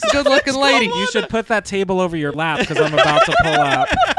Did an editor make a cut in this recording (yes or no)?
yes